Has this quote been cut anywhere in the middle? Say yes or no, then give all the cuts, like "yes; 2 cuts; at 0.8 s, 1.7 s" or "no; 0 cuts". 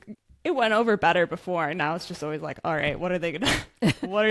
no; 0 cuts